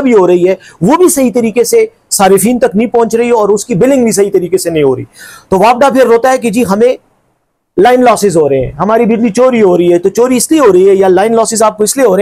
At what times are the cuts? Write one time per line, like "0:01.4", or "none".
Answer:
none